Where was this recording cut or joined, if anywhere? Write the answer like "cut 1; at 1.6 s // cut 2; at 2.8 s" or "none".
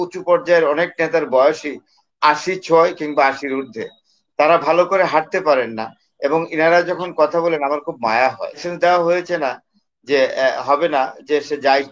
cut 1; at 8.7 s